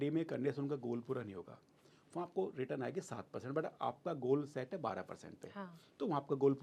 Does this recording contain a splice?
no; 0 cuts

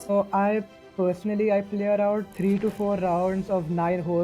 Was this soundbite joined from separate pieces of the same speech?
no; 0 cuts

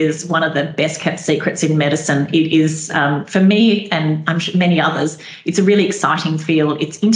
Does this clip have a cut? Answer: no; 0 cuts

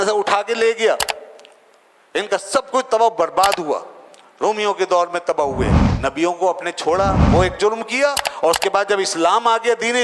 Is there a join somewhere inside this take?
yes; 1 cut; at 5.8 s

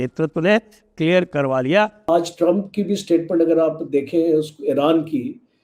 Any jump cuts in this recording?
yes; 1 cut; at 2.1 s

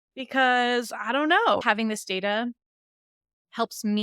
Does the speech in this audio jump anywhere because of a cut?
yes; 1 cut; at 1.6 s

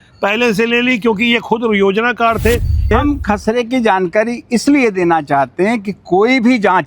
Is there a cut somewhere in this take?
yes; 1 cut; at 2.9 s

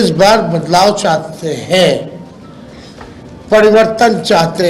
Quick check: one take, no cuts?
yes; 0 cuts

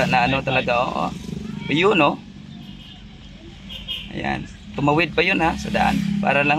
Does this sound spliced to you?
no; 0 cuts

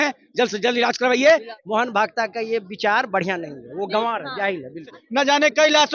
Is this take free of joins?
no; 2 cuts; at 1.5 s, 5.0 s

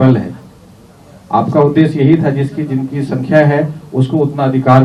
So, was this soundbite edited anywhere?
no; 0 cuts

